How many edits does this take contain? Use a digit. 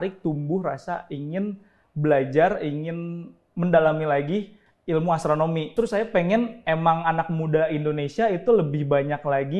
1